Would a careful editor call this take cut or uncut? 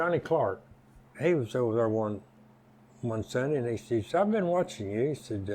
cut